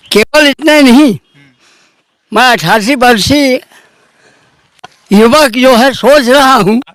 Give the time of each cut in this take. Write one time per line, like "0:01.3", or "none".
none